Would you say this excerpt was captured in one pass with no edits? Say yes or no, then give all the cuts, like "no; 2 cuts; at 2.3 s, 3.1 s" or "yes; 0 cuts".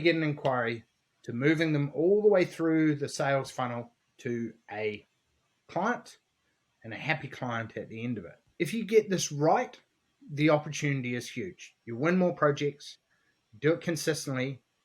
yes; 0 cuts